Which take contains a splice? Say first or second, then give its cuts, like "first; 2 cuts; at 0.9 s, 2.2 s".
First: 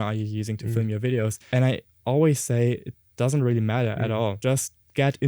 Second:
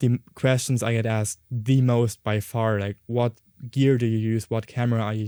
first; 2 cuts; at 1.4 s, 4.4 s